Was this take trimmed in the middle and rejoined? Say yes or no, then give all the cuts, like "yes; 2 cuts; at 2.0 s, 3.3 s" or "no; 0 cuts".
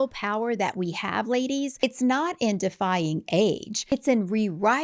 yes; 2 cuts; at 1.8 s, 3.8 s